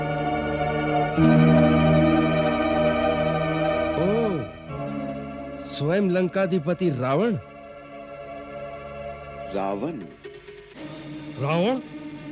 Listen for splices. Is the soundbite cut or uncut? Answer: uncut